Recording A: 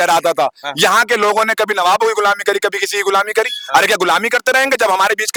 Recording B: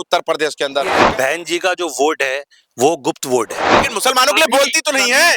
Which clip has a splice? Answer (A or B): B